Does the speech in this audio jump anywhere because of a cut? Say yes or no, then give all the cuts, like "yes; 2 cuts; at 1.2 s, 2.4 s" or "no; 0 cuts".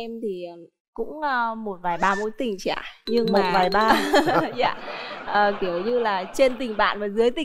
no; 0 cuts